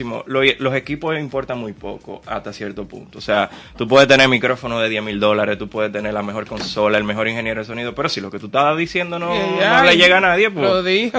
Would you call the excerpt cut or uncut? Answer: uncut